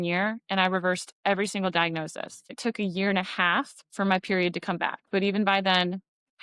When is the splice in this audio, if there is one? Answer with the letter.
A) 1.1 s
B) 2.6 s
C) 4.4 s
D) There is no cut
B